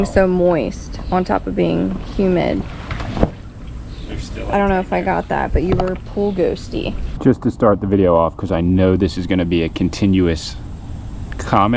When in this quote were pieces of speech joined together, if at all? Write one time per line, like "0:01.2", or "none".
0:07.1